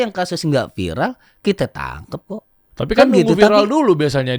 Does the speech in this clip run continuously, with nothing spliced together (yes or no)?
no